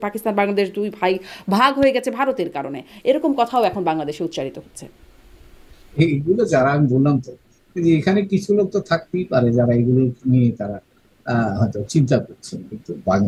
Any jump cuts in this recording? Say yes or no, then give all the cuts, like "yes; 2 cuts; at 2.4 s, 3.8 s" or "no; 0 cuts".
no; 0 cuts